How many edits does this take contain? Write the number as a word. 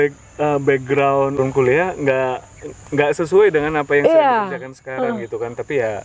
one